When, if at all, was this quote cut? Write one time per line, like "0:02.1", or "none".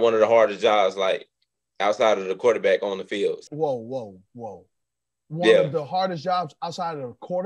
0:03.5